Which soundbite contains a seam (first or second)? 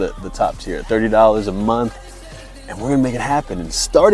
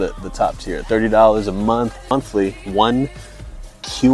second